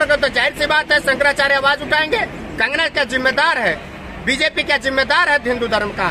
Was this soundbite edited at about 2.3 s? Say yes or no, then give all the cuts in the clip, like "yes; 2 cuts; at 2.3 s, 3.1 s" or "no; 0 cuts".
no; 0 cuts